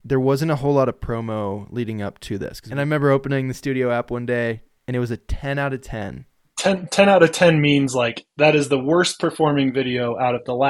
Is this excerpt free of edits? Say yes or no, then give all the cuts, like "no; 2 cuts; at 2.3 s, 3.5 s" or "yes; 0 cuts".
no; 2 cuts; at 2.6 s, 6.5 s